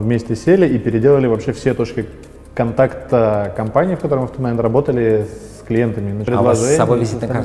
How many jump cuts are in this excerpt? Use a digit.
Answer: 1